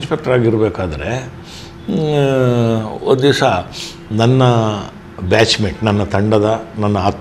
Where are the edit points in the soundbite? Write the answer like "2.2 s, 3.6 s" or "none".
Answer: none